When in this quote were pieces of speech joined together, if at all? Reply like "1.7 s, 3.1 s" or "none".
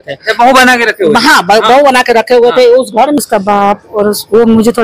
3.2 s